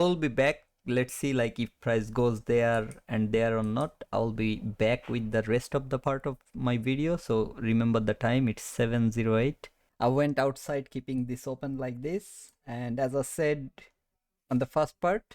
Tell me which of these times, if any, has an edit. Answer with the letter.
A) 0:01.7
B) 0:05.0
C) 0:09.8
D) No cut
C